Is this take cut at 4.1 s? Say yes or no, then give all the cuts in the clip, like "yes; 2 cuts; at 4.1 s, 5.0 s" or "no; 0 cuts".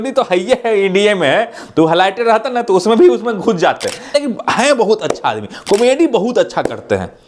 yes; 1 cut; at 4.1 s